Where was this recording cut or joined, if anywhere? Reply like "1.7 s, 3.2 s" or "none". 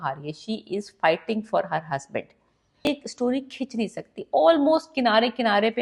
2.9 s